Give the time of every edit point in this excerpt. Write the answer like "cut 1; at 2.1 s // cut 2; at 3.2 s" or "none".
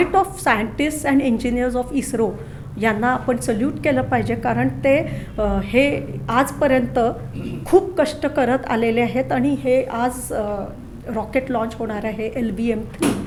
none